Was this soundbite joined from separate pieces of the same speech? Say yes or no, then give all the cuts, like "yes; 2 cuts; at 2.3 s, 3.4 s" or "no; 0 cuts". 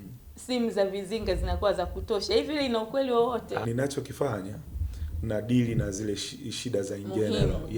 yes; 1 cut; at 3.6 s